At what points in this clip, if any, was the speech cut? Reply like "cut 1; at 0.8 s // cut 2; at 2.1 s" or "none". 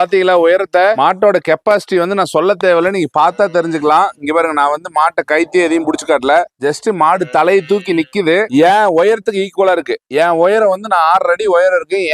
none